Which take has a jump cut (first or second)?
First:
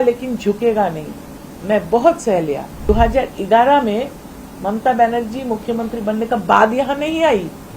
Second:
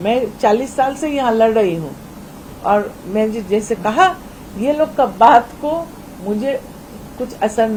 first